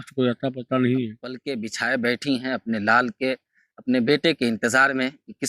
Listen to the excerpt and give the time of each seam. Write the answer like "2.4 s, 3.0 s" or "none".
1.5 s